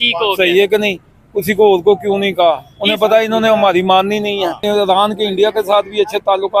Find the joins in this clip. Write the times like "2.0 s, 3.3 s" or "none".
4.6 s